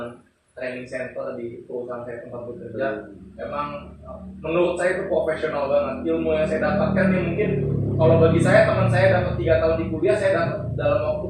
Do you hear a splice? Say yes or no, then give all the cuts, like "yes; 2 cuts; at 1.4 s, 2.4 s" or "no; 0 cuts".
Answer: no; 0 cuts